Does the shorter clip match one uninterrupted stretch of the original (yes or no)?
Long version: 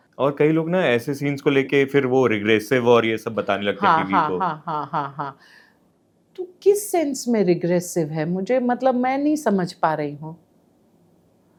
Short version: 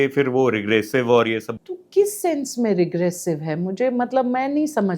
no